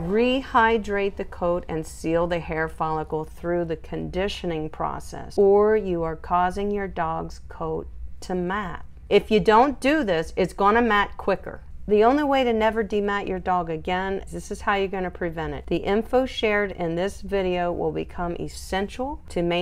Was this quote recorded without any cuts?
yes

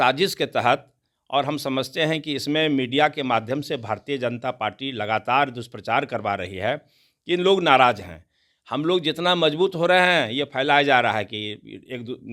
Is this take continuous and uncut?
yes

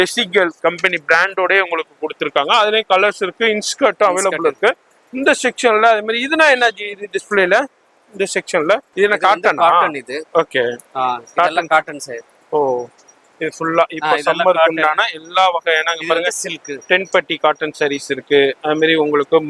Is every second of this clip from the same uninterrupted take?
yes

